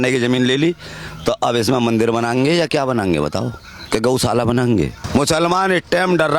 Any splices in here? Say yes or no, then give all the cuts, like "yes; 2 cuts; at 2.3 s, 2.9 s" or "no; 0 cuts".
yes; 1 cut; at 5.0 s